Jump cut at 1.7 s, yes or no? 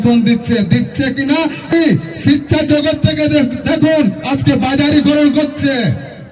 yes